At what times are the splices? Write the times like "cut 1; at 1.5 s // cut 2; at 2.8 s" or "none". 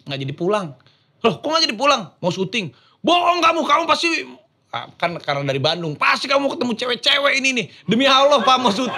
none